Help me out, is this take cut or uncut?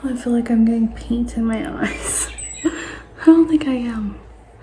uncut